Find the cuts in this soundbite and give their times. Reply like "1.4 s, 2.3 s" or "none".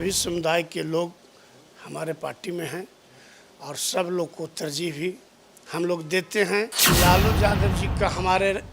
6.8 s